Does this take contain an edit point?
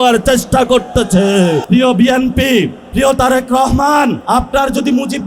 yes; 3 cuts; at 1.6 s, 2.8 s, 4.2 s

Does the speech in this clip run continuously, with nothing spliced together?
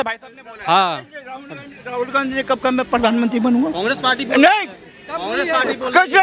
yes; 0 cuts

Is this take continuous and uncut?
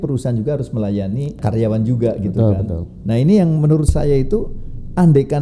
no; 1 cut; at 1.4 s

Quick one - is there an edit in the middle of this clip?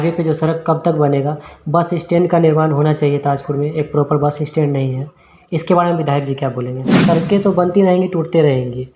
yes; 1 cut; at 6.9 s

